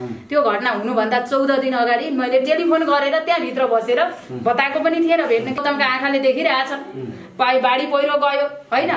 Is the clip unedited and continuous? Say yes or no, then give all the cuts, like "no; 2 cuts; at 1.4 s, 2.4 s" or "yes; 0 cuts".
no; 1 cut; at 5.6 s